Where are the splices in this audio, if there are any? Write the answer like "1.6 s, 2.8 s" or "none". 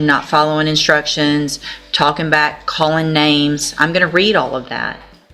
none